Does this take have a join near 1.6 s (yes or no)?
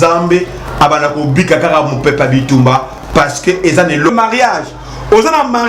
no